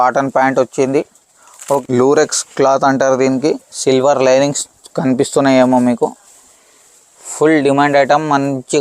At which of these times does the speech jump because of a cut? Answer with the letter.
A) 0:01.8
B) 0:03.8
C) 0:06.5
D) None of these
A